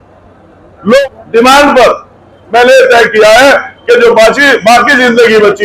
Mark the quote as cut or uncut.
cut